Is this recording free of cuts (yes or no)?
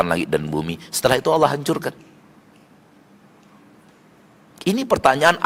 yes